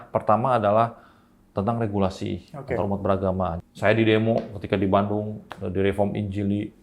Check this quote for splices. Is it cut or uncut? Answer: cut